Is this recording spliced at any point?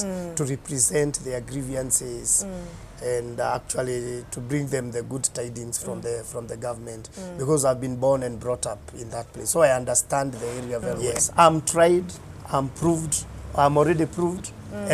yes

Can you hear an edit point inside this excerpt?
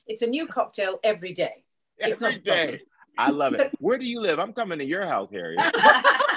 no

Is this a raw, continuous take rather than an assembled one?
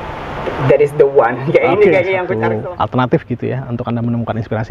no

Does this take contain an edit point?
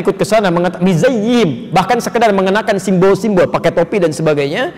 no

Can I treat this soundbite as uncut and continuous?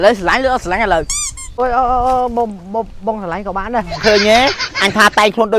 no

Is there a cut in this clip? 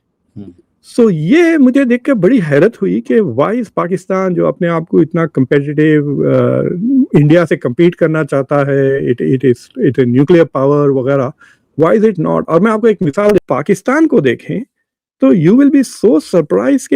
yes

